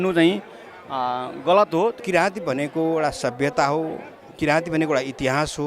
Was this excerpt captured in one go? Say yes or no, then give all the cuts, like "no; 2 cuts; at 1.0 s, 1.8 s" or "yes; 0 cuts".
no; 1 cut; at 2.0 s